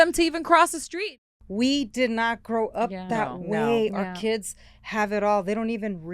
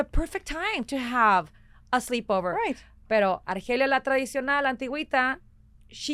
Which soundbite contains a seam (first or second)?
first